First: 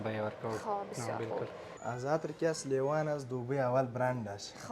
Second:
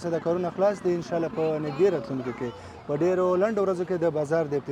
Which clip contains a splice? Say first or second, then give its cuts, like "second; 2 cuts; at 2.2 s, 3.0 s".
first; 1 cut; at 1.8 s